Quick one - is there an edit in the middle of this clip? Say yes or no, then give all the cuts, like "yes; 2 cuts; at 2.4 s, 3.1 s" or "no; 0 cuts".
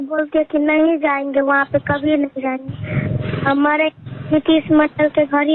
no; 0 cuts